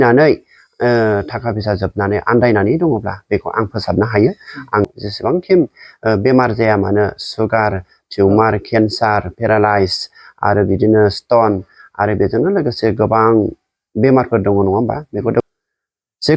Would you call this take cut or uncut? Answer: cut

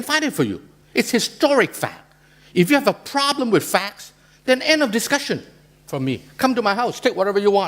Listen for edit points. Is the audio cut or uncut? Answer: cut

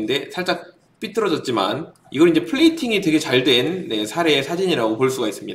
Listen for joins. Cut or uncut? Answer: cut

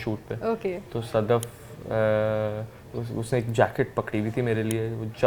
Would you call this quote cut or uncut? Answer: uncut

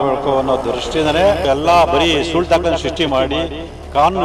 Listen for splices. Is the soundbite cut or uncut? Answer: cut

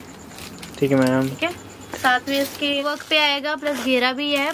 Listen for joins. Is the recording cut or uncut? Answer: cut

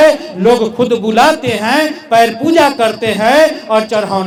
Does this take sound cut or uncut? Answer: uncut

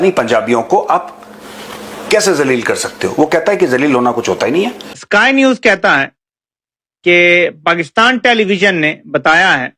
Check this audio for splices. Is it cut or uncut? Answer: cut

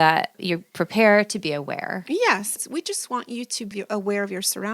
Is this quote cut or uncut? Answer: cut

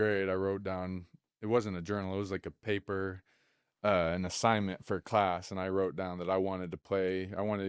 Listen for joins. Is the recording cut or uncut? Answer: uncut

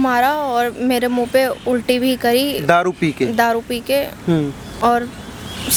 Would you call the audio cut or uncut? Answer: uncut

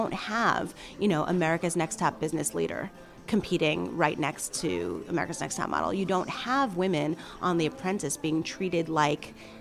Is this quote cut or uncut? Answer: uncut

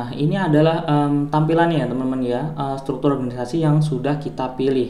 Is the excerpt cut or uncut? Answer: uncut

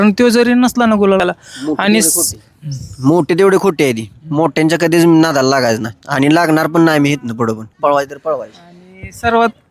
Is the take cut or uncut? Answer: cut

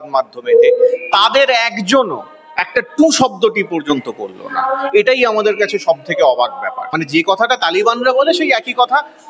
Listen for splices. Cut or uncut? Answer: cut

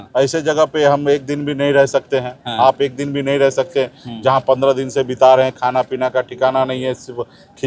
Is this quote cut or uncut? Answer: uncut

